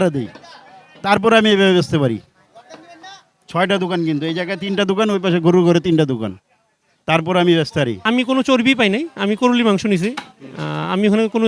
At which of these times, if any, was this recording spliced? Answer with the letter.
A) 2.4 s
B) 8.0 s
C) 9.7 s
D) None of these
B